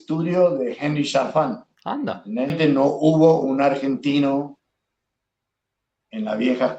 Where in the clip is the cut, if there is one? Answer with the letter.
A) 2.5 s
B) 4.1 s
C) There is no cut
A